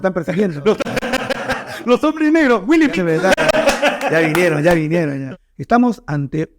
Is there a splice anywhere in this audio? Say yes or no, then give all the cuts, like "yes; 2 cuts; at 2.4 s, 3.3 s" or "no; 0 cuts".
yes; 1 cut; at 5.2 s